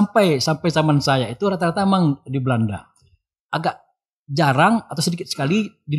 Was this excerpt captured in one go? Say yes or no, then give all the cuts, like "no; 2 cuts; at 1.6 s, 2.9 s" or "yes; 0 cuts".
yes; 0 cuts